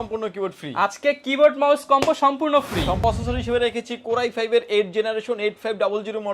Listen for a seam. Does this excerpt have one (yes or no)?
yes